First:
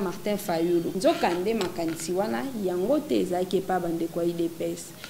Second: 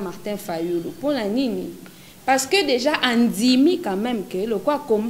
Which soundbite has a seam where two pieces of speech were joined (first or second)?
first